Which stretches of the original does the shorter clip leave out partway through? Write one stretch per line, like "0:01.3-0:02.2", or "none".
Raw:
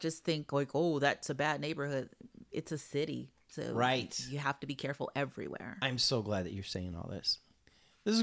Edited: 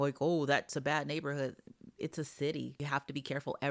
0:03.3-0:04.3